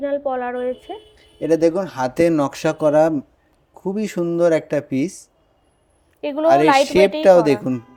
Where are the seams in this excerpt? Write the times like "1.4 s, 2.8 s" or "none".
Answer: none